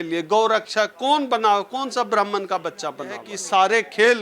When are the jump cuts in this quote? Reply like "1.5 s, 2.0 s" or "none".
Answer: 3.3 s